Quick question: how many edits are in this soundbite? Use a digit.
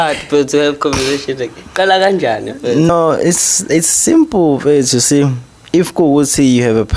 1